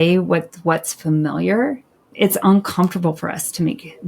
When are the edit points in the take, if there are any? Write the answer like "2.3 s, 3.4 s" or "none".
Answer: 2.1 s